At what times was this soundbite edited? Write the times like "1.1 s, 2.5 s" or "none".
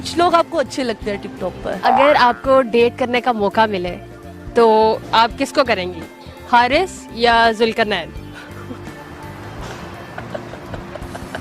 1.6 s